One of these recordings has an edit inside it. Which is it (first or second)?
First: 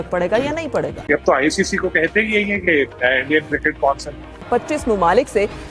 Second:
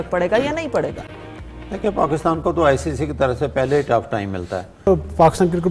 first